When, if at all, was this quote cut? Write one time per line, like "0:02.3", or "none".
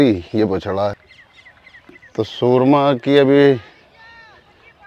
0:01.0

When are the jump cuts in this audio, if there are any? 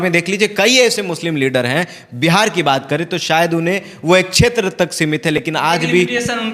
none

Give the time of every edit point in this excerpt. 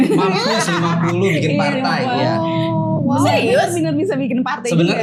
none

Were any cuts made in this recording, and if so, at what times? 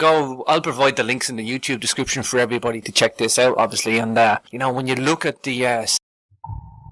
none

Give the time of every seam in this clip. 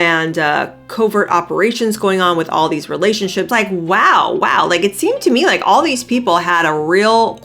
0:03.5

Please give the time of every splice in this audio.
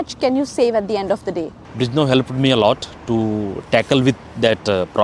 0:01.6

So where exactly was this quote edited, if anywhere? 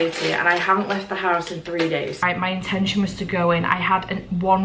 0:02.2

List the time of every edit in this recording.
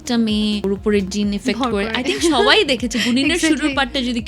0:00.9

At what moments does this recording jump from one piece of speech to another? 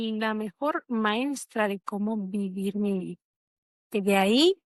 none

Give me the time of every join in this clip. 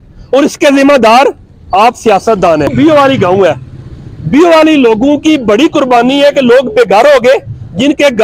0:02.7

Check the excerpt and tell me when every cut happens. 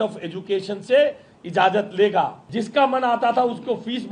0:02.4

